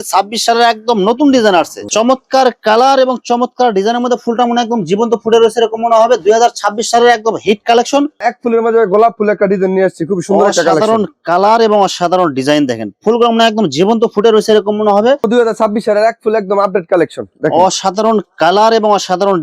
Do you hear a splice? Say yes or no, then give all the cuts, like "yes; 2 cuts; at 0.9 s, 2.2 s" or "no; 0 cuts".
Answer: yes; 3 cuts; at 1.9 s, 8.2 s, 15.2 s